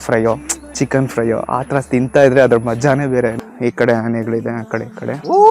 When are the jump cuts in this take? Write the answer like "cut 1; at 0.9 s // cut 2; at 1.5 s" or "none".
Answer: cut 1; at 3.4 s